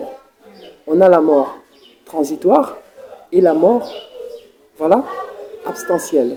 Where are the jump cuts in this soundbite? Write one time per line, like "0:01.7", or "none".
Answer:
none